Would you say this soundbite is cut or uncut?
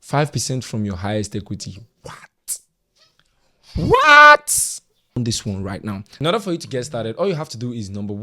cut